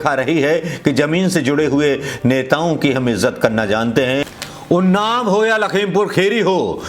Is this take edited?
yes; 1 cut; at 4.4 s

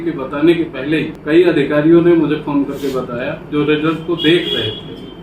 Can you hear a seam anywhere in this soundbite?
yes; 1 cut; at 1.2 s

